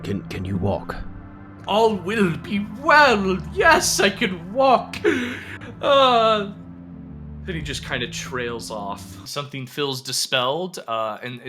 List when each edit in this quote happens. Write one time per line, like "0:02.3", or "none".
0:09.2

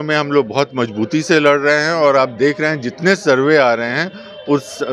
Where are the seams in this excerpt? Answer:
none

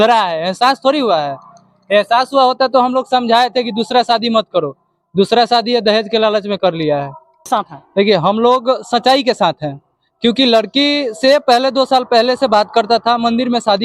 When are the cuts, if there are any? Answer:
0:07.5

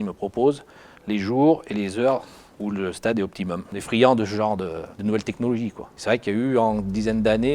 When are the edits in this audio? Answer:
0:03.7

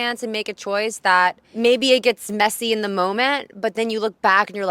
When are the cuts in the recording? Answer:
0:01.5

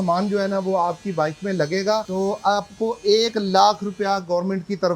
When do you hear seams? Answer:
0:02.1

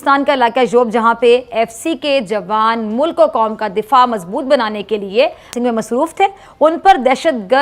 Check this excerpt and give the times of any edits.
none

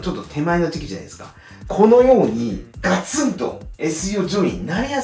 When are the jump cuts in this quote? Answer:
0:01.6

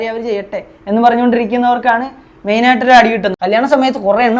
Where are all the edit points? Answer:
0:03.3

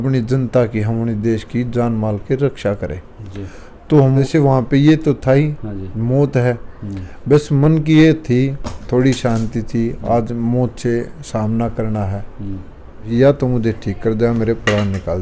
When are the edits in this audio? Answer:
0:04.2
0:13.1

